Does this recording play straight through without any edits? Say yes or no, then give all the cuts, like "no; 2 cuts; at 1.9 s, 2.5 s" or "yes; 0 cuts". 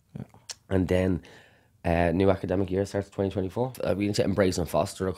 no; 1 cut; at 3.8 s